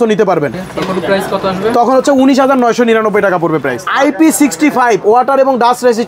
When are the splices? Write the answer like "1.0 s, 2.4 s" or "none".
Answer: 3.9 s